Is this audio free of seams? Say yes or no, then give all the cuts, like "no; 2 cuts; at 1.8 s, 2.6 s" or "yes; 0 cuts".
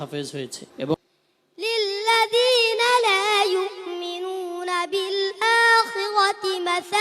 no; 1 cut; at 0.9 s